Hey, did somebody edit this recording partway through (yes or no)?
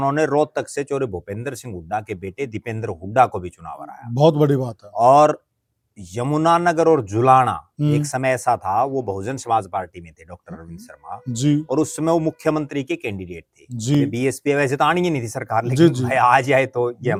no